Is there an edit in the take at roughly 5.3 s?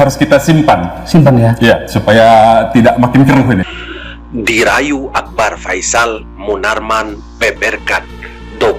no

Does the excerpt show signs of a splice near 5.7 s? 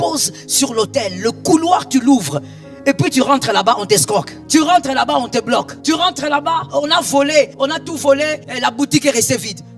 yes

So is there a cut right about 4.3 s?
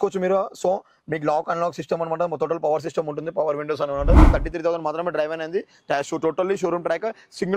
yes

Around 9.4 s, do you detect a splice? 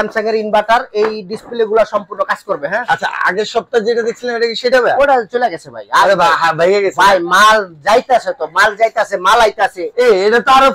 no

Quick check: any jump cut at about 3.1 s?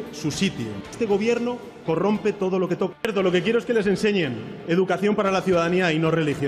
yes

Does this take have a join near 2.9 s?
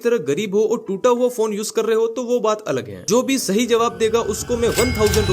yes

